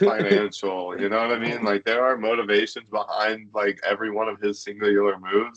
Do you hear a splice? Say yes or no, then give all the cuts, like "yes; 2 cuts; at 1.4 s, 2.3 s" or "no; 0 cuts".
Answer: no; 0 cuts